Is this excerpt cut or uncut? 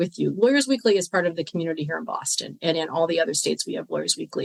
uncut